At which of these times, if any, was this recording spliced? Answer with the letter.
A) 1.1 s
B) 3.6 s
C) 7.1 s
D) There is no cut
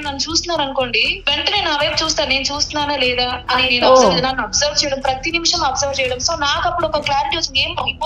A